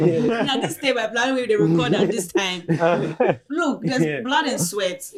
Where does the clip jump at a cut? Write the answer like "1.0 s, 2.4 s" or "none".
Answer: none

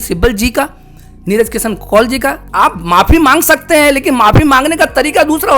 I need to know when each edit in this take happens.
2.5 s

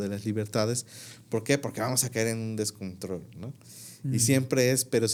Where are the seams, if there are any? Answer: none

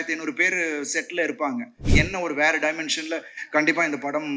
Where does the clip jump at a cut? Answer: 1.8 s

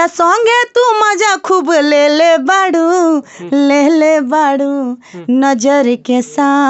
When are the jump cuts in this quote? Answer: none

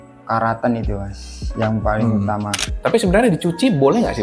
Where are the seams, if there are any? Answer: 2.5 s

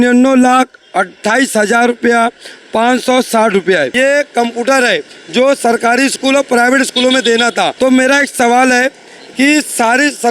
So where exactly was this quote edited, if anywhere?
3.9 s, 7.7 s

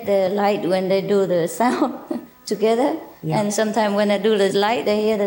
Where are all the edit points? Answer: 3.9 s

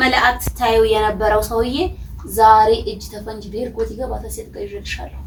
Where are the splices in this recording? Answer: none

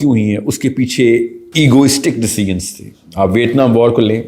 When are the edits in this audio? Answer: 1.4 s

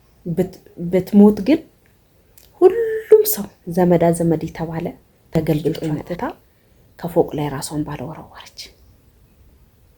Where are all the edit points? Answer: 6.1 s

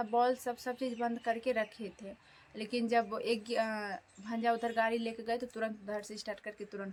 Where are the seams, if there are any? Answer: none

